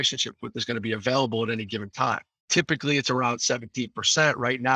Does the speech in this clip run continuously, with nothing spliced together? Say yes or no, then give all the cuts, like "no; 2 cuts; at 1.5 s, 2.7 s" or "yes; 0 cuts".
no; 1 cut; at 2.3 s